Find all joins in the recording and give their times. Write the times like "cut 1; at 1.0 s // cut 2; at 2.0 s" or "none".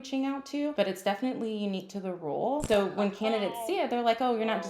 cut 1; at 0.7 s // cut 2; at 2.6 s